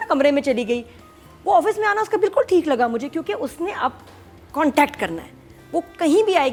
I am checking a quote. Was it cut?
no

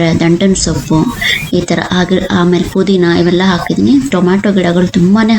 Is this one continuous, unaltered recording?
yes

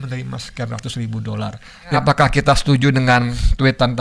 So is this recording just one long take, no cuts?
no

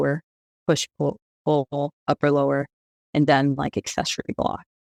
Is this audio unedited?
yes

